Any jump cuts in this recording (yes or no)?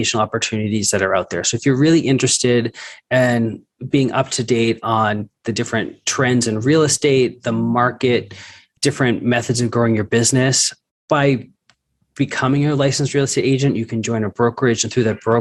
no